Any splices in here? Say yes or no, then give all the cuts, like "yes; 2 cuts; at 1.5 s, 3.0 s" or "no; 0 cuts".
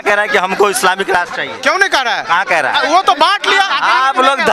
no; 0 cuts